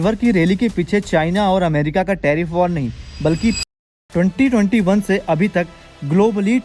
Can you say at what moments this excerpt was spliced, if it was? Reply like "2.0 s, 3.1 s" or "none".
3.6 s

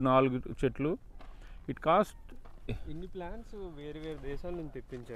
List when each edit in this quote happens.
2.8 s

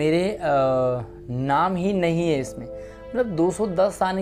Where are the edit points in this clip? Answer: none

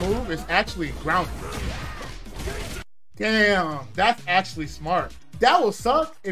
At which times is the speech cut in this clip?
none

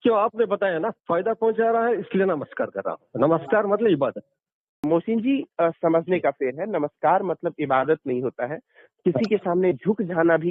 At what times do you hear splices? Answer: 4.8 s

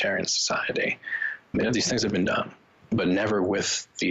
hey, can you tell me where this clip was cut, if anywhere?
1.5 s, 2.9 s

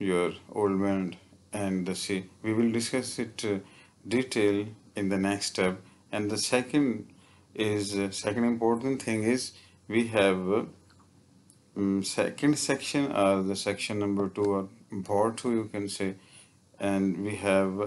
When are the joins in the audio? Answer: none

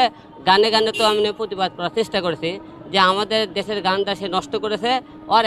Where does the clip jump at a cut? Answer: none

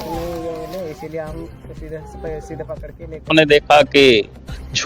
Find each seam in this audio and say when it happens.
3.3 s

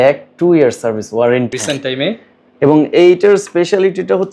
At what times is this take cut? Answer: 1.5 s

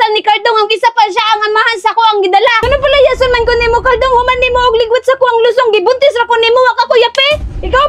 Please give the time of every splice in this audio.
2.7 s

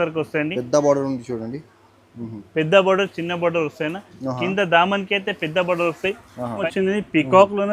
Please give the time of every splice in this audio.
6.6 s

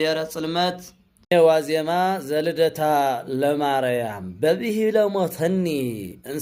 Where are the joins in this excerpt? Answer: 1.3 s

